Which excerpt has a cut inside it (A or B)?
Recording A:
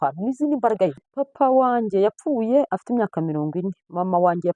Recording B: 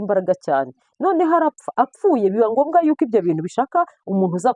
A